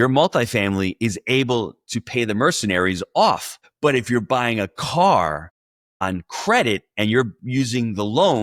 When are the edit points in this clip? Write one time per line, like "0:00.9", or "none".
none

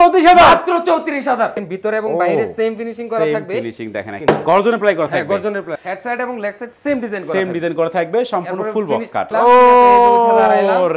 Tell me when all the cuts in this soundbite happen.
0:01.6
0:04.1
0:05.8
0:09.3

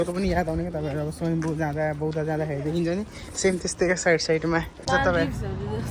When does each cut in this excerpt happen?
0:04.9

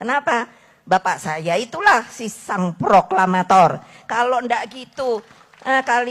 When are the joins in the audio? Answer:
none

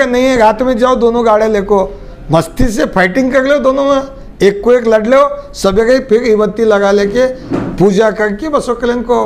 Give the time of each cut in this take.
none

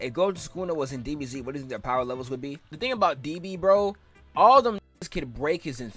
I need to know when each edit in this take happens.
none

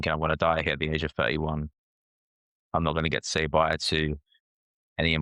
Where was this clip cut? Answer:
none

